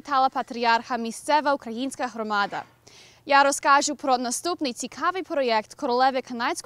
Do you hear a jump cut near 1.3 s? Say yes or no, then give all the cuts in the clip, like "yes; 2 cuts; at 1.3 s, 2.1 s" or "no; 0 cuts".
yes; 1 cut; at 1.3 s